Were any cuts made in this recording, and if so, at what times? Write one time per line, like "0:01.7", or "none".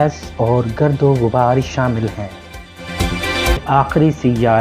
0:03.6